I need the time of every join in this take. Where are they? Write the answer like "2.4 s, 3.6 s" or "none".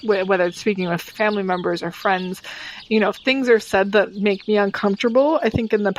1.0 s